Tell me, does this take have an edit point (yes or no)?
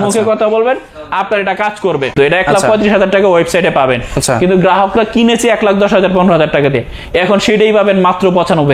yes